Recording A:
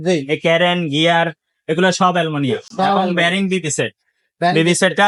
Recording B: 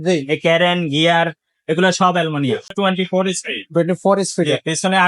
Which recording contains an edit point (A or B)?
B